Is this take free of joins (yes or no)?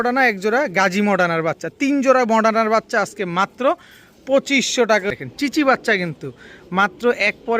no